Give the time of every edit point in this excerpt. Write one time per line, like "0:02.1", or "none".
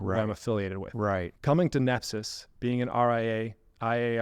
0:01.3